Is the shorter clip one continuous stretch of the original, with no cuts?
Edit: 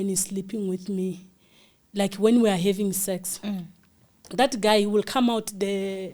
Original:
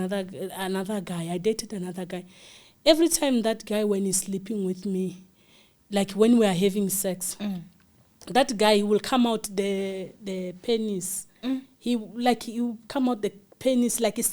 yes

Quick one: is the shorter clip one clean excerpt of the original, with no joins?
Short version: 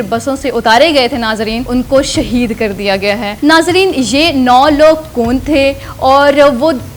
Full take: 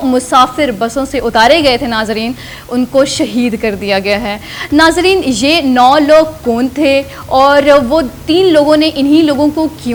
no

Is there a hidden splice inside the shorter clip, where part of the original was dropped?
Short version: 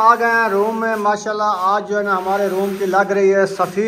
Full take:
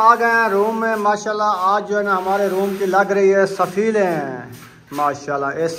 no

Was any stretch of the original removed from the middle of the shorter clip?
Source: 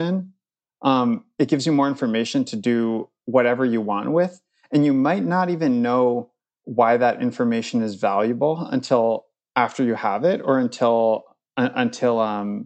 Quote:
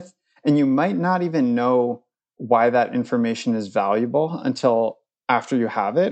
no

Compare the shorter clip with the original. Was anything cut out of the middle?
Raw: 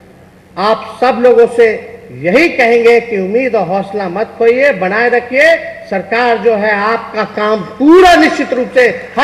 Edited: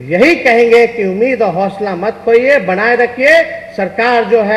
no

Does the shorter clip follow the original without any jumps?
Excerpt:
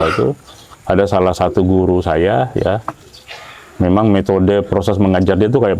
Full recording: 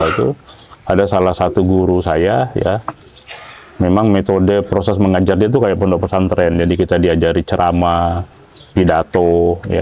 yes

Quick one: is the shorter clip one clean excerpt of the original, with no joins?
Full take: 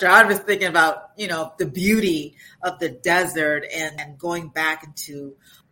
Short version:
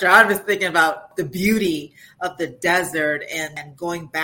no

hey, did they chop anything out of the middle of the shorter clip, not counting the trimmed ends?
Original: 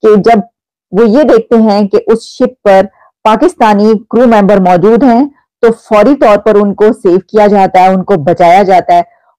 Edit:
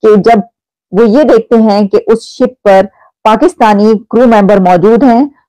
no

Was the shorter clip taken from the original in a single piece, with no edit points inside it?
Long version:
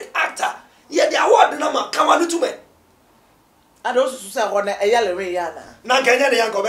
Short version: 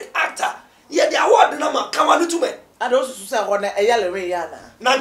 no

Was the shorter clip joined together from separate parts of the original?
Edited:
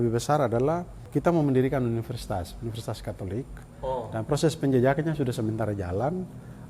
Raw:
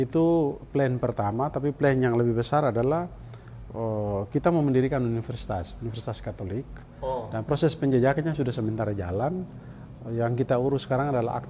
yes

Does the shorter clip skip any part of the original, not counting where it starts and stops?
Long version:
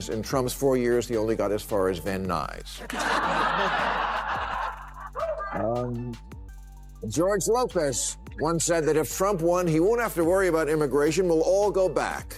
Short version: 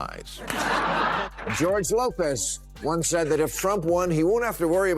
yes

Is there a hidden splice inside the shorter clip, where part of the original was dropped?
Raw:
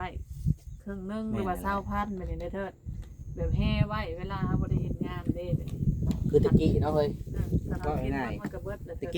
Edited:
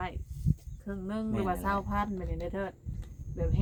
no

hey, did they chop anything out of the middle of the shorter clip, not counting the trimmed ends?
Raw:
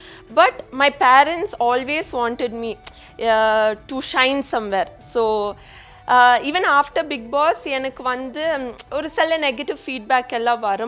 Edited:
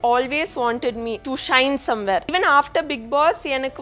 yes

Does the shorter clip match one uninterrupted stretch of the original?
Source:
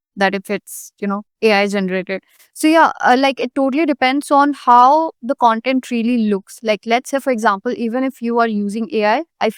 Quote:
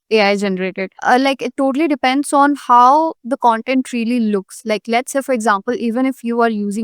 no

